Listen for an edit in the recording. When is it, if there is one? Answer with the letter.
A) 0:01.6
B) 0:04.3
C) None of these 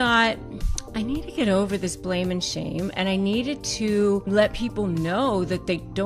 B